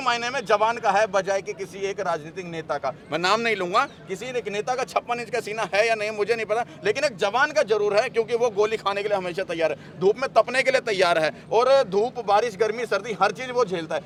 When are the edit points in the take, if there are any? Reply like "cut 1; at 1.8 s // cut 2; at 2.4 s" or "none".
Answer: none